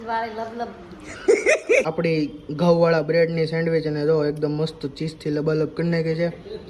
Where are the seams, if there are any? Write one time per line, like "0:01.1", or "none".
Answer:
0:01.0
0:01.9